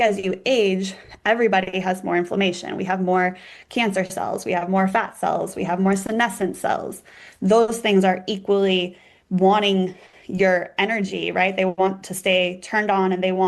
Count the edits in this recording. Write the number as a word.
zero